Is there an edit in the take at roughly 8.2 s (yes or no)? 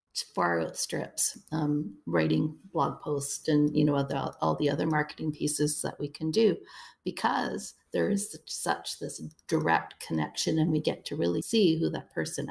no